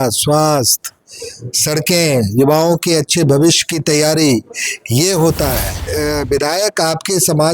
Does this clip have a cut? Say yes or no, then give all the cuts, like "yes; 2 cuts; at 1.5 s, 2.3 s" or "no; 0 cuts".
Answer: yes; 1 cut; at 5.9 s